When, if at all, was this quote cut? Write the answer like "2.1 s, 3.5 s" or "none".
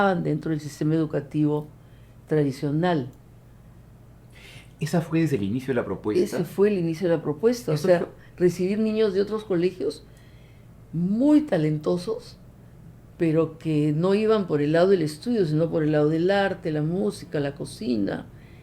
none